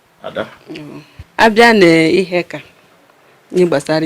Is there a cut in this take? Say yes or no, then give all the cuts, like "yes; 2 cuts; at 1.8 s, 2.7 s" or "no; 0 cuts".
yes; 1 cut; at 1.1 s